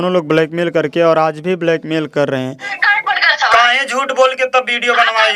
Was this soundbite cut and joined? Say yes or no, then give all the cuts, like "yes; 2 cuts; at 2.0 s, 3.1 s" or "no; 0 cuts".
yes; 1 cut; at 2.7 s